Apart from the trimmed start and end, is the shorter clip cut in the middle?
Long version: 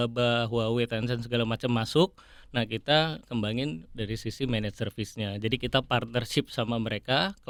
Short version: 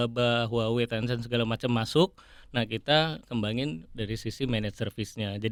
no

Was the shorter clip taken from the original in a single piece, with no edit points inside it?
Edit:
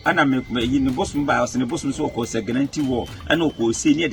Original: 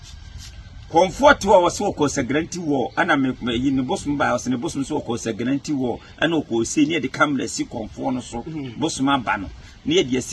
yes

